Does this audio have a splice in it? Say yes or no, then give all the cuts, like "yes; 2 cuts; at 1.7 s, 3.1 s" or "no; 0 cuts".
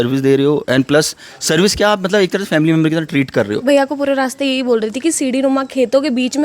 yes; 1 cut; at 3.6 s